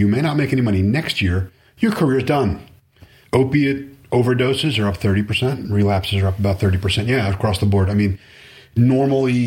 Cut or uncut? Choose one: cut